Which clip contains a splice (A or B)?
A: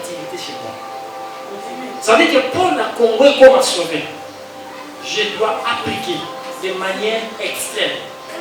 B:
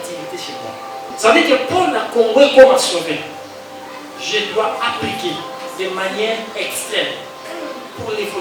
B